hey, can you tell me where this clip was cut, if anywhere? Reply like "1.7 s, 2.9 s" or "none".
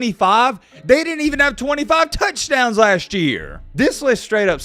3.6 s